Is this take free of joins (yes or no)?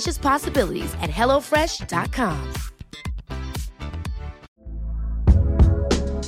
no